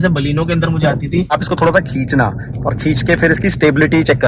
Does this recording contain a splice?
yes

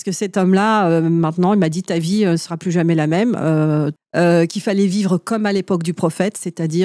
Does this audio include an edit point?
yes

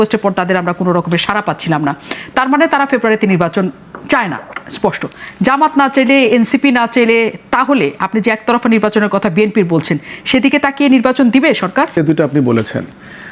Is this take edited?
yes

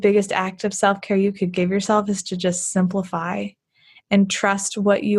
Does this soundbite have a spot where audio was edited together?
no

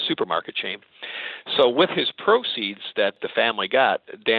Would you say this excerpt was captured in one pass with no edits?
no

